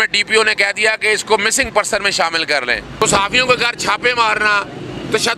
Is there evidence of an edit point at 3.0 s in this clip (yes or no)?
yes